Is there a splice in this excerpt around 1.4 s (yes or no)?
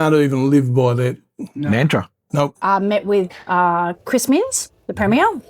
no